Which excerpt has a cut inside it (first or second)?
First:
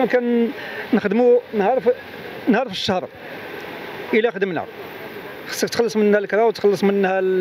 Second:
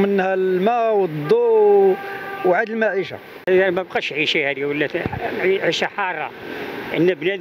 second